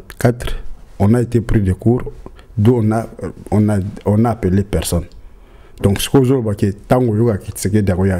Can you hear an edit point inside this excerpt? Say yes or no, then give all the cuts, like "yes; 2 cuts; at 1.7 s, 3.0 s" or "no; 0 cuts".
no; 0 cuts